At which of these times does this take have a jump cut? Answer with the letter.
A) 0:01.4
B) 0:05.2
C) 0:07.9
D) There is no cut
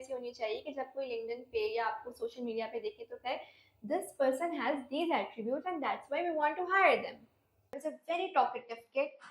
C